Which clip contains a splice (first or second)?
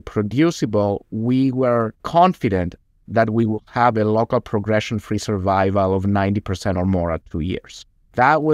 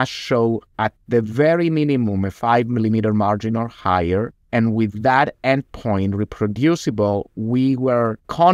second